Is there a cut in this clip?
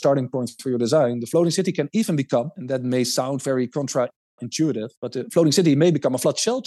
no; 0 cuts

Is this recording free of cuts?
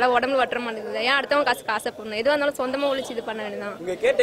yes; 0 cuts

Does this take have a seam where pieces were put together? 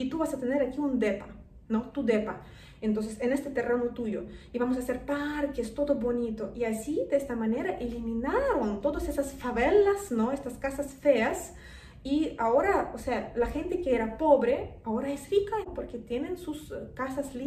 yes; 1 cut; at 15.6 s

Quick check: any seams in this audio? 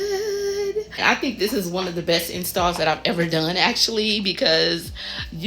yes; 1 cut; at 1.0 s

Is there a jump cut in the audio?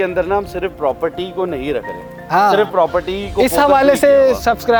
no; 0 cuts

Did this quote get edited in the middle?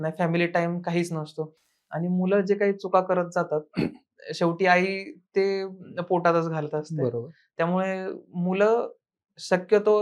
no; 0 cuts

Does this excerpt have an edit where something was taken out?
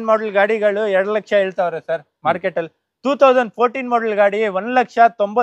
no; 0 cuts

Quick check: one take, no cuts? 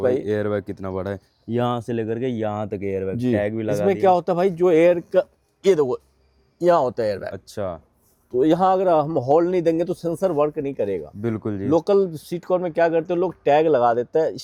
yes; 0 cuts

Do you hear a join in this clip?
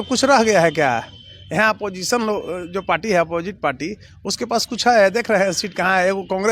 no; 0 cuts

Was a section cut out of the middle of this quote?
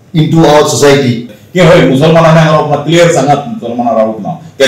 yes; 1 cut; at 1.4 s

